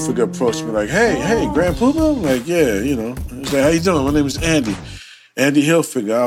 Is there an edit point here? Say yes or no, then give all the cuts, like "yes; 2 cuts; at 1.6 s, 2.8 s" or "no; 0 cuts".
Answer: no; 0 cuts